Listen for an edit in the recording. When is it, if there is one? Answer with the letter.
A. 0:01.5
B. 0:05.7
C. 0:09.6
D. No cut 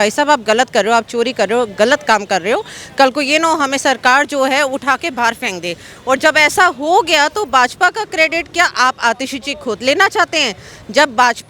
D